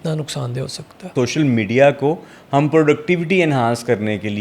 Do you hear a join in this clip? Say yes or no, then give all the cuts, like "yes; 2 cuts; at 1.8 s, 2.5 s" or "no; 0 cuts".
yes; 1 cut; at 1.1 s